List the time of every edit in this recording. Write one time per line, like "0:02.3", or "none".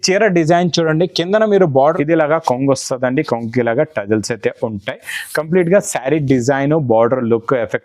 0:02.0